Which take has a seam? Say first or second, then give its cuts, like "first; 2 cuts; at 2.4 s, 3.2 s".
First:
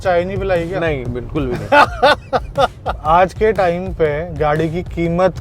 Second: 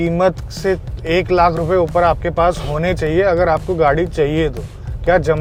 first; 1 cut; at 3.0 s